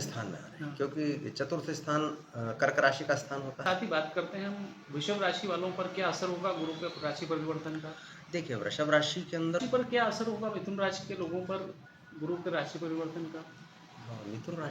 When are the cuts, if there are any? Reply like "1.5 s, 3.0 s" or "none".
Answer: 3.6 s, 9.6 s